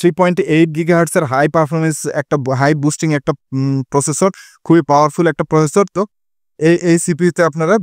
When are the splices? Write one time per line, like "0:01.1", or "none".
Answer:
0:05.9